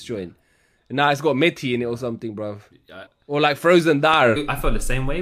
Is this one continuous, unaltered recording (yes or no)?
no